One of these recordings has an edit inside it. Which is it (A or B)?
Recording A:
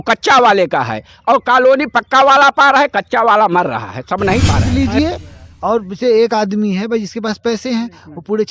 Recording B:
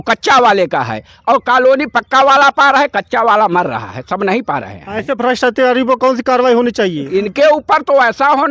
A